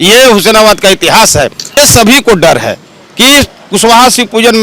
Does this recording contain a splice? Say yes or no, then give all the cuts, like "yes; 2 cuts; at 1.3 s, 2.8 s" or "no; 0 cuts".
yes; 1 cut; at 1.8 s